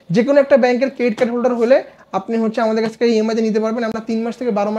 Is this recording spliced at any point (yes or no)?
no